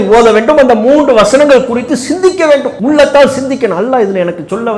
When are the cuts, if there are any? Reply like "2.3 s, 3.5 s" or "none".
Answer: 2.7 s